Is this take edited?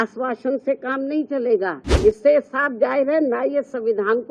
yes; 1 cut; at 2.0 s

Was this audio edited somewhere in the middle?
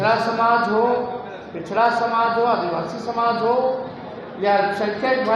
no; 0 cuts

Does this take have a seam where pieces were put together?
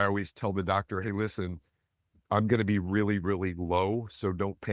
no; 0 cuts

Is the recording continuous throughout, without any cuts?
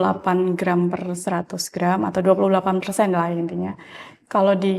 yes; 0 cuts

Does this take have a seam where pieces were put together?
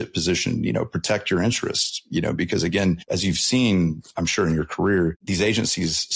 yes; 2 cuts; at 3.0 s, 5.2 s

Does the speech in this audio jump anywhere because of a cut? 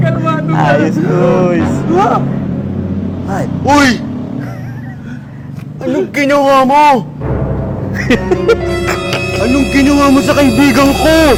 no; 0 cuts

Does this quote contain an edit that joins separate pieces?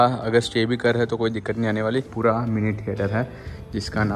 yes; 1 cut; at 1.8 s

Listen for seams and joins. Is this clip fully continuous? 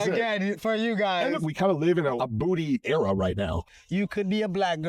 no; 3 cuts; at 1.4 s, 2.2 s, 3.7 s

